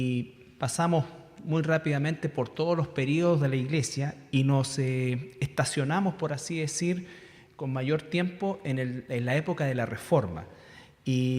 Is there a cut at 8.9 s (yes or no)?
yes